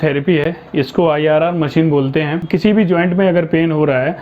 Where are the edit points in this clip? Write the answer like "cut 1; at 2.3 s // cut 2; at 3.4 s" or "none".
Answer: cut 1; at 2.4 s